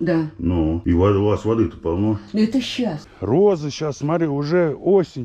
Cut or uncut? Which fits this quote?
cut